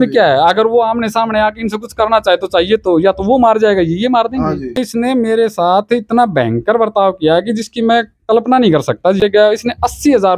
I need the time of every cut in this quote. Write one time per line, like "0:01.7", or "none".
0:04.8
0:09.2